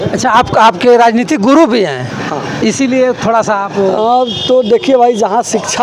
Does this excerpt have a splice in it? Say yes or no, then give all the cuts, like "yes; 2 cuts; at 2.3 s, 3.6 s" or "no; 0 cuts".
no; 0 cuts